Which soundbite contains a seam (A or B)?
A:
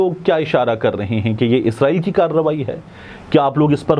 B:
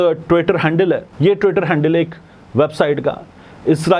B